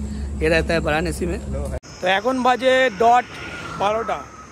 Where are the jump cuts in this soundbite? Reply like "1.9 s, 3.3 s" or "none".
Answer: 1.8 s